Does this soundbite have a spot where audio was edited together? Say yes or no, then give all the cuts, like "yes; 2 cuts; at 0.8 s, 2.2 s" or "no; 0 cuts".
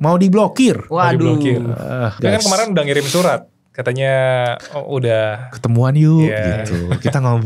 yes; 1 cut; at 2.2 s